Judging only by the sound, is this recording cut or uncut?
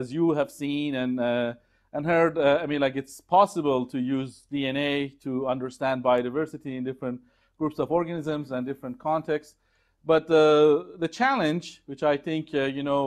cut